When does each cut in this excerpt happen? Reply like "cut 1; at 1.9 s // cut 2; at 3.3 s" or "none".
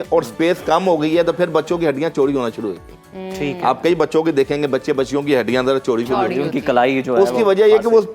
none